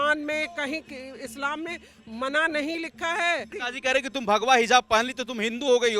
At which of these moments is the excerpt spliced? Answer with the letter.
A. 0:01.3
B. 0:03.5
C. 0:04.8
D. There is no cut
B